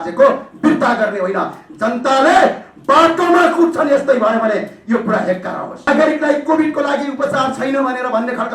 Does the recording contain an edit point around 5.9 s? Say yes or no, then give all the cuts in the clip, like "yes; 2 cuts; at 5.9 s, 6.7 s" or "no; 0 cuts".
yes; 1 cut; at 5.9 s